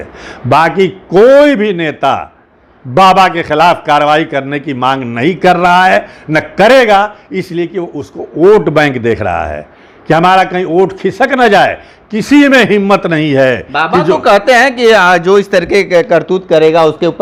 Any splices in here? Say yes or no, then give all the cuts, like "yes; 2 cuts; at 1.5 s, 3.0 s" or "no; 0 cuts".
no; 0 cuts